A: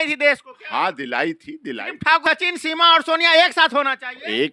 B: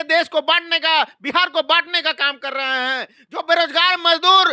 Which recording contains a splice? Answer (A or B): A